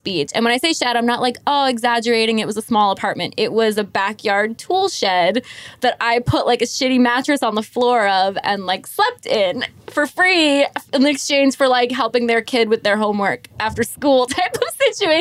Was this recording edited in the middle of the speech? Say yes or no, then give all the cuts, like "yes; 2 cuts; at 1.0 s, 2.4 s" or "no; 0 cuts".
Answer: no; 0 cuts